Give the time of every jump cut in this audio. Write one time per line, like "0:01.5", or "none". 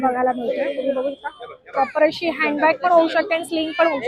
none